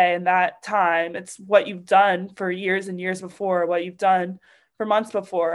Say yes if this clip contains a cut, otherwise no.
no